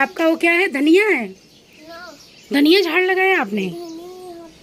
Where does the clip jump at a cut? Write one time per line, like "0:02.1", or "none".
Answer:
none